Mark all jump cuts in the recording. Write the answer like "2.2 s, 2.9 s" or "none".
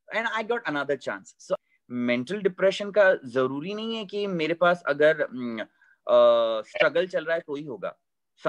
1.6 s